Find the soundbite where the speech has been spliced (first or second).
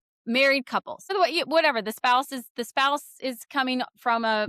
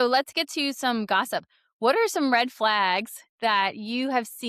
first